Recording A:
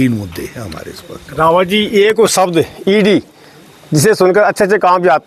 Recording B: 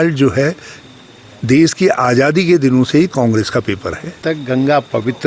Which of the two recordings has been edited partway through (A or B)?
B